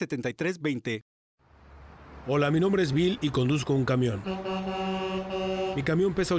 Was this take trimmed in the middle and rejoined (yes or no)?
yes